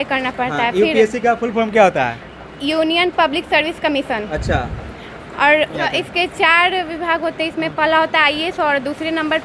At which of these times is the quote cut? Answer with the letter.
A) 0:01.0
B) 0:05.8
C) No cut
B